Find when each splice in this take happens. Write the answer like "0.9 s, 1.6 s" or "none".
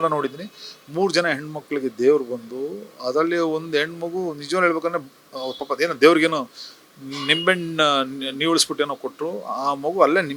none